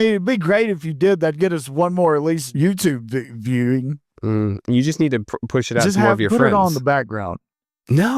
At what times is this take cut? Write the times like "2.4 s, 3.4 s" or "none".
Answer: 2.5 s